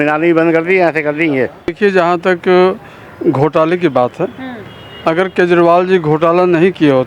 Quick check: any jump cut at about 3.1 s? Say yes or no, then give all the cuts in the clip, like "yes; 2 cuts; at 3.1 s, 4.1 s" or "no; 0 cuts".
no; 1 cut; at 1.8 s